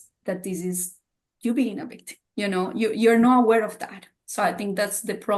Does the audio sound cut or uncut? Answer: uncut